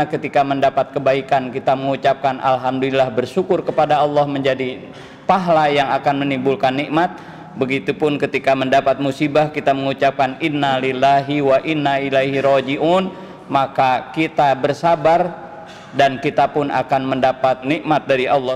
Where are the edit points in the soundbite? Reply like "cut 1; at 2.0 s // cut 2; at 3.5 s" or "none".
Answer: cut 1; at 17.6 s